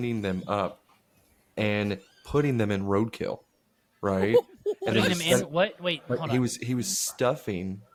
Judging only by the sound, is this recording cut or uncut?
uncut